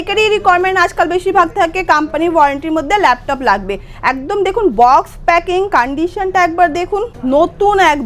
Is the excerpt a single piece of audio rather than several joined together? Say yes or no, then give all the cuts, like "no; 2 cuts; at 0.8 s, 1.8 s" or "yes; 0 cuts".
no; 1 cut; at 7.1 s